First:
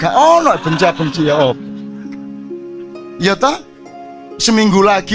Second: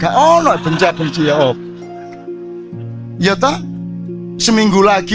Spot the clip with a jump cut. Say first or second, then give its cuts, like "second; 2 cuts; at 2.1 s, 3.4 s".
first; 2 cuts; at 1.6 s, 3.0 s